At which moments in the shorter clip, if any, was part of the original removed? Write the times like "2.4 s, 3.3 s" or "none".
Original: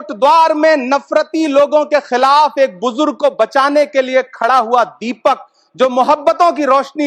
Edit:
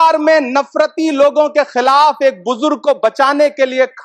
none